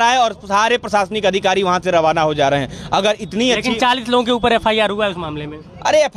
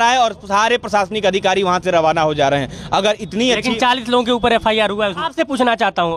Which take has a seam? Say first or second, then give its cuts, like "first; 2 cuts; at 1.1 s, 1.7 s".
second; 1 cut; at 5.2 s